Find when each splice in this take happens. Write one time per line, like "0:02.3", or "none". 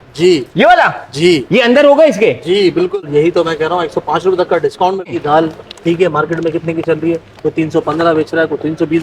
0:02.9
0:05.2